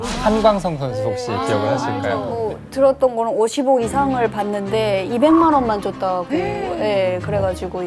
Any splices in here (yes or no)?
yes